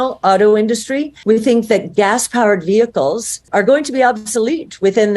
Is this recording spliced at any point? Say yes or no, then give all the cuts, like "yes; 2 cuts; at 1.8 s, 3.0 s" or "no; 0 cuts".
yes; 2 cuts; at 1.1 s, 3.5 s